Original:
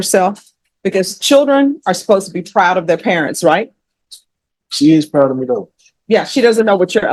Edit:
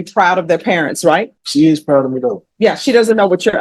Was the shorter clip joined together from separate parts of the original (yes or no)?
yes